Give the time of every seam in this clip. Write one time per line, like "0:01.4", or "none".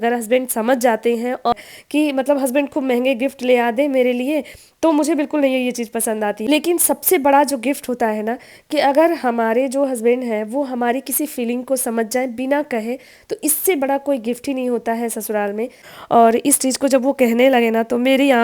0:01.5
0:06.4
0:15.8